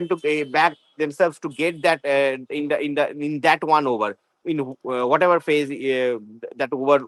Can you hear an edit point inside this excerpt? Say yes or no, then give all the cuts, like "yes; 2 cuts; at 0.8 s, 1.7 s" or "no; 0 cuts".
no; 0 cuts